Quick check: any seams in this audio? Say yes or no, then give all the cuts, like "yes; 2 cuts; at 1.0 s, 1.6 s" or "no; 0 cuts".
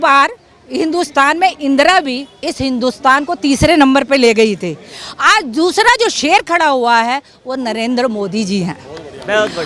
no; 0 cuts